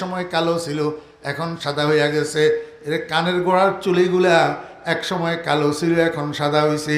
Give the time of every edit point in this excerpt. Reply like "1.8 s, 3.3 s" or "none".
none